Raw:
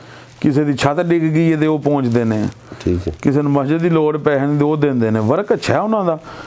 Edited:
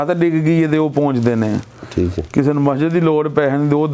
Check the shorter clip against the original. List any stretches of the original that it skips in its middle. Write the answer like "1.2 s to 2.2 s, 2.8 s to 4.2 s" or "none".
none